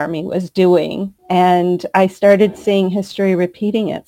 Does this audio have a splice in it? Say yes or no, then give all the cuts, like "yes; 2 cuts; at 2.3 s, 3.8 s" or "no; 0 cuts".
yes; 1 cut; at 1.2 s